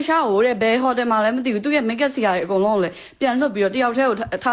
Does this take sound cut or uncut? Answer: uncut